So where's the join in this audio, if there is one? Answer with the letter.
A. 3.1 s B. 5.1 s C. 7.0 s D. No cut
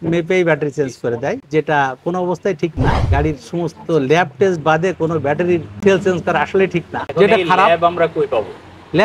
C